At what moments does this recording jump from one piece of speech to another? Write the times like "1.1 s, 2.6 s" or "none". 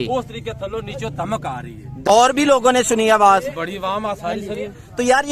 2.0 s